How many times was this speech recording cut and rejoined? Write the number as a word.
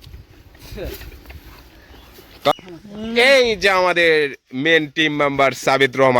one